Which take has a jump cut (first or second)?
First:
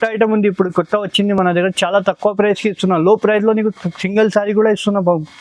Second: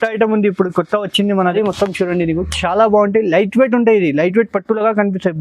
second